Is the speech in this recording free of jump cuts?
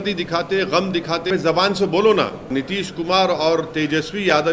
no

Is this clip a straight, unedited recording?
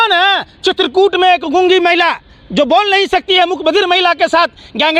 yes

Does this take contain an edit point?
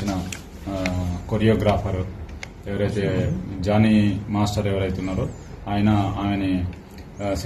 no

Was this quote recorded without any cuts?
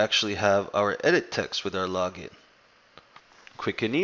yes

